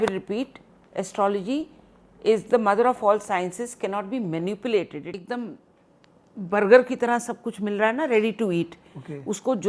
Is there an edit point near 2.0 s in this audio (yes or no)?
no